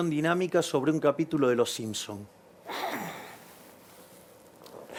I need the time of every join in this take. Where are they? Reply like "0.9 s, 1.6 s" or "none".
none